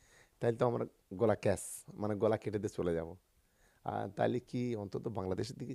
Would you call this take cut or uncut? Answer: uncut